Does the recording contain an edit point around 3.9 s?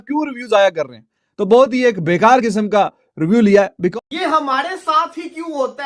yes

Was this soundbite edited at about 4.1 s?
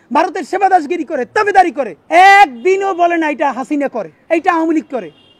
yes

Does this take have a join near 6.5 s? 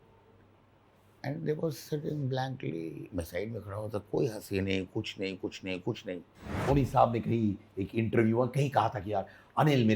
yes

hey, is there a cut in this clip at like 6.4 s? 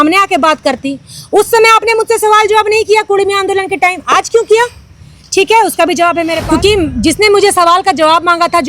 yes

